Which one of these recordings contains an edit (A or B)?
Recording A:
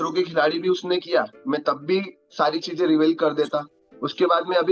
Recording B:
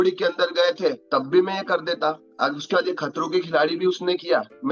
B